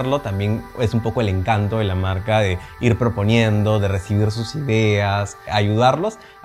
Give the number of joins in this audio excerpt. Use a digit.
0